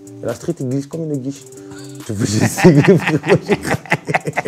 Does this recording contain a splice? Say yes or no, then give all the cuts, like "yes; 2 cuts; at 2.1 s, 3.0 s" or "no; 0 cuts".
no; 0 cuts